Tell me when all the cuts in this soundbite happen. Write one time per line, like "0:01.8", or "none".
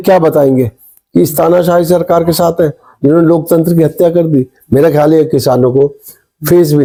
none